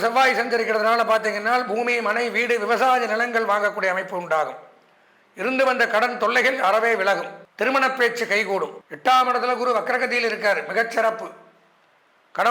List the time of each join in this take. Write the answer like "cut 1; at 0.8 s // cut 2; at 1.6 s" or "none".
cut 1; at 7.4 s // cut 2; at 8.8 s